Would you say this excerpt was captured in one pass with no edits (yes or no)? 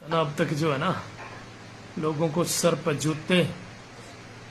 yes